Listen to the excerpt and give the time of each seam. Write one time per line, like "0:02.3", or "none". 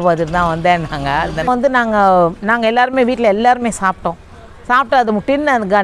0:01.5